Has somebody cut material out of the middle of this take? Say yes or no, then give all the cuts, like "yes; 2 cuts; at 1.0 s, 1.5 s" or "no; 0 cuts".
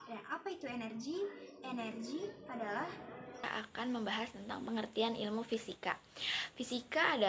yes; 1 cut; at 3.4 s